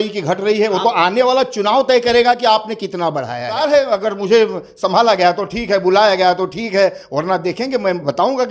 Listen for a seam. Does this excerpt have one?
yes; 1 cut; at 3.6 s

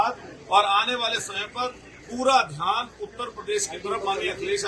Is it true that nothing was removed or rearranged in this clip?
yes; 0 cuts

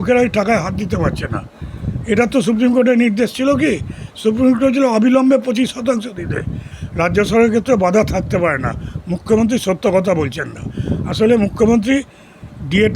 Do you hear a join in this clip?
yes; 1 cut; at 6.8 s

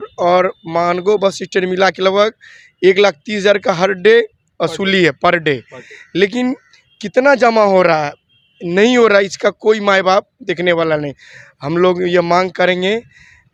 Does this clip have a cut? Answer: no; 0 cuts

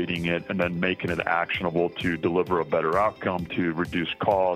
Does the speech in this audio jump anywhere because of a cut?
no; 0 cuts

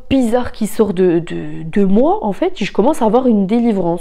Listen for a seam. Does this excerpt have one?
no; 0 cuts

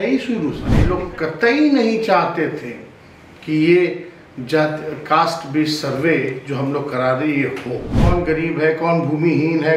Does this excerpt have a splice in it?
yes; 2 cuts; at 0.8 s, 7.9 s

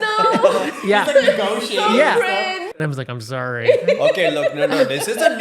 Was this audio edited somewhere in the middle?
yes; 1 cut; at 2.6 s

